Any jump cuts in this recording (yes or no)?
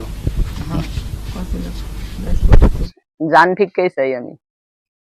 yes